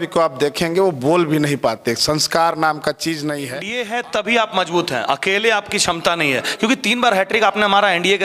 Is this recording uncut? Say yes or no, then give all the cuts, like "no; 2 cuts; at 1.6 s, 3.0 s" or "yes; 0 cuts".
no; 1 cut; at 4.1 s